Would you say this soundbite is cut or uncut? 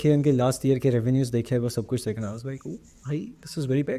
uncut